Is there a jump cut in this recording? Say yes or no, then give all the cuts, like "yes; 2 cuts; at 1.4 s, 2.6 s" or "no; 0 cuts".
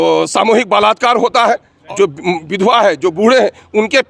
yes; 1 cut; at 1.7 s